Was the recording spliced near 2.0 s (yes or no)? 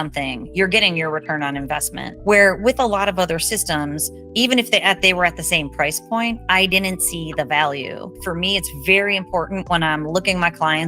yes